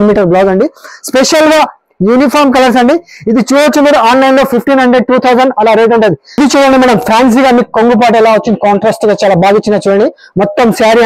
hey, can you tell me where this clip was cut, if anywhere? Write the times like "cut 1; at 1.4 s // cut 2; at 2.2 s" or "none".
cut 1; at 6.5 s